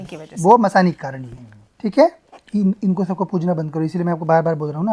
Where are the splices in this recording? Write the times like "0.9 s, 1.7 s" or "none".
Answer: 2.3 s